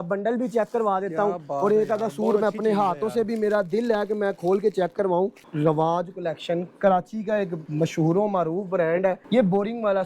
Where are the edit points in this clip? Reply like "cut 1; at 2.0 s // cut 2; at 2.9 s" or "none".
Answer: cut 1; at 5.4 s // cut 2; at 7.6 s // cut 3; at 9.2 s